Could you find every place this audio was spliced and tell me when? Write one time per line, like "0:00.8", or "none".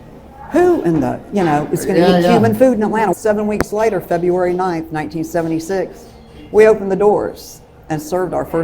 0:03.1